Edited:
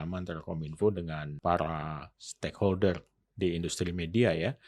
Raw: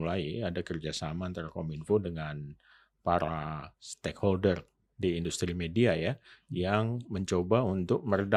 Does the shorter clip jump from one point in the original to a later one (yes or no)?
yes